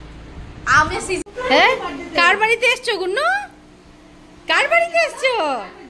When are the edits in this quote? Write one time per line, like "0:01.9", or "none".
0:01.3